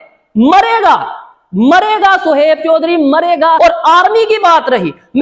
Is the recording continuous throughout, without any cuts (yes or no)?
no